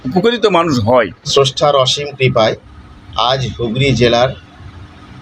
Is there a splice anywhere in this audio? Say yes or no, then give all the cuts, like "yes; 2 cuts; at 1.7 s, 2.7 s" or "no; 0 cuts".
yes; 1 cut; at 1.2 s